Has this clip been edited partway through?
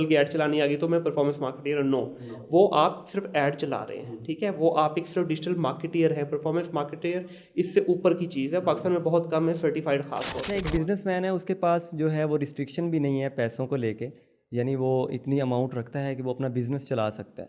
yes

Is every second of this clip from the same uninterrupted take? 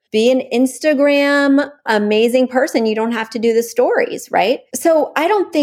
no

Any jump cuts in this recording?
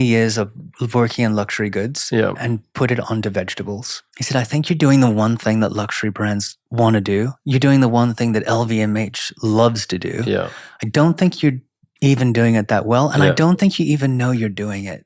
yes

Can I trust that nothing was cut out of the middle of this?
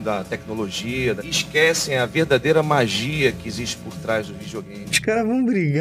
no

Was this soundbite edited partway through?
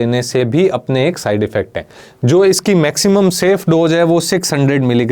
no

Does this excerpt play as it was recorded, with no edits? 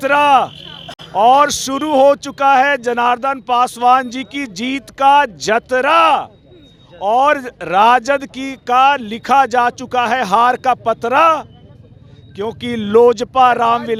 yes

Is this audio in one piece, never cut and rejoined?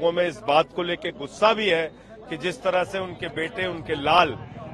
yes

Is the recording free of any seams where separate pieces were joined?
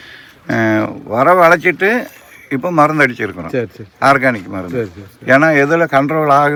yes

